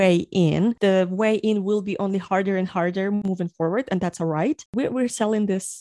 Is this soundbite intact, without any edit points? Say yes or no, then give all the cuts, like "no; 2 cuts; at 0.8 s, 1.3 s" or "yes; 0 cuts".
yes; 0 cuts